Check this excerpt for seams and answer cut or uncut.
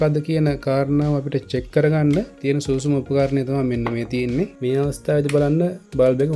cut